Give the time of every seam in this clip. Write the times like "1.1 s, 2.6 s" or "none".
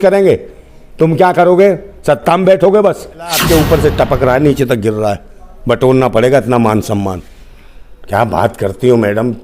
3.4 s